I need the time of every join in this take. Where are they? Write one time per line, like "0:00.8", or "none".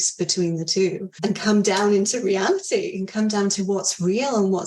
0:01.1